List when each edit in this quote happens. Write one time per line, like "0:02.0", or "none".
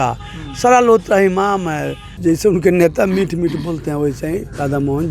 0:02.1